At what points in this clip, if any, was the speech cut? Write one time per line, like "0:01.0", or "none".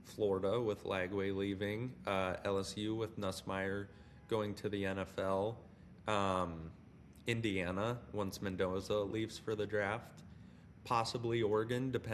none